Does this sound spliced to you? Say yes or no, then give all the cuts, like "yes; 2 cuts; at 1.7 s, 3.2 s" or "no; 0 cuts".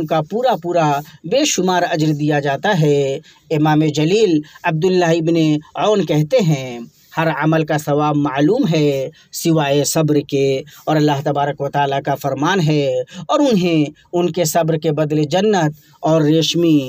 no; 0 cuts